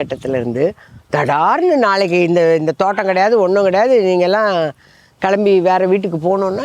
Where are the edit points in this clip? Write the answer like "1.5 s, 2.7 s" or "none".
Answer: none